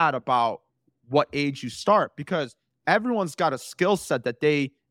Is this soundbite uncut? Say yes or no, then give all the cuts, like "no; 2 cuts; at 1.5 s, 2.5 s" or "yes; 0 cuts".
yes; 0 cuts